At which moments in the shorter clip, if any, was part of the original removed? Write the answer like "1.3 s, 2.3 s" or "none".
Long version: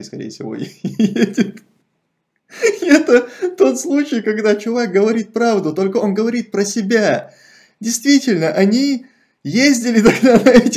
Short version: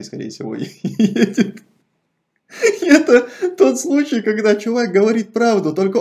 none

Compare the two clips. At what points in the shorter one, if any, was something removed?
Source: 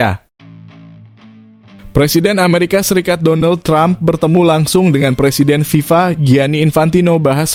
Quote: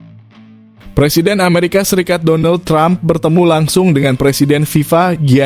0.9 s

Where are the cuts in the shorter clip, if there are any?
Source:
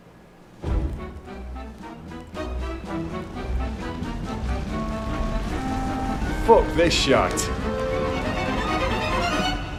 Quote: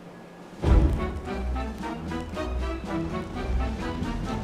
none

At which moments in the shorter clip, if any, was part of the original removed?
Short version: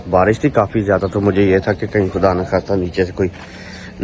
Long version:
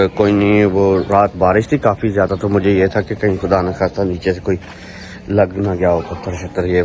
none

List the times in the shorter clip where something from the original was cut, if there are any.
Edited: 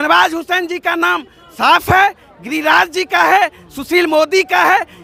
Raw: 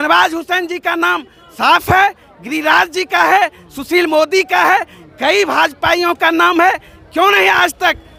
none

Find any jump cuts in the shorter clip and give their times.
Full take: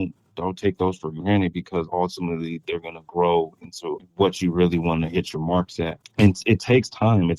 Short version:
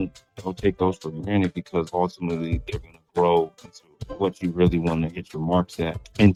none

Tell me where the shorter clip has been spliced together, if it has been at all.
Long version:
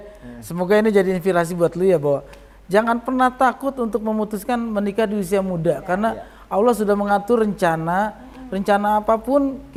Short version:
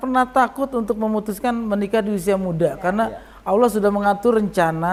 none

